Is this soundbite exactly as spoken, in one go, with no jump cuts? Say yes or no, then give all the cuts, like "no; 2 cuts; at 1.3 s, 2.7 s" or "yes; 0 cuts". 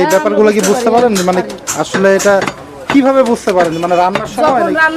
yes; 0 cuts